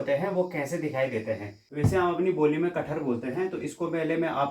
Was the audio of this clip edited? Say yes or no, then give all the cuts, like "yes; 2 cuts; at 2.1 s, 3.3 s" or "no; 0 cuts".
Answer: yes; 1 cut; at 1.6 s